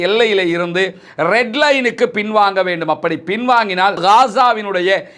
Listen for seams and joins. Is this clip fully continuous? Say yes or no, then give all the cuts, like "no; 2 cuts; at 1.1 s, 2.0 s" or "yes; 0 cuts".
yes; 0 cuts